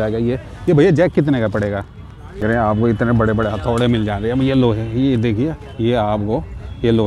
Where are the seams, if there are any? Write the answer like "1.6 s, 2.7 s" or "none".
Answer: 2.4 s